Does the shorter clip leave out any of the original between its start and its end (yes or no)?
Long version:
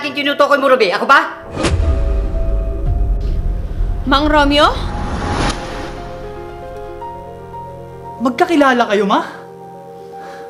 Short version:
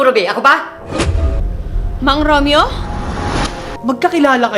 yes